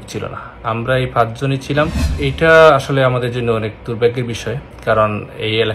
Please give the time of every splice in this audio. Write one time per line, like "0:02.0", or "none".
0:02.1